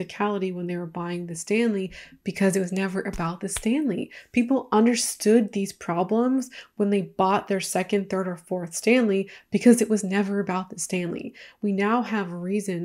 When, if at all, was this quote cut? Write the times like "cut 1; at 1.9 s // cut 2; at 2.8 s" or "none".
none